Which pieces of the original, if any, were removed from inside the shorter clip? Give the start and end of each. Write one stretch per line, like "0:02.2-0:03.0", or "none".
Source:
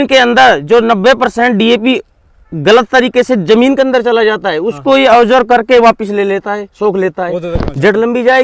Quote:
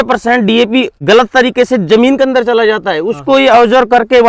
0:02.1-0:02.5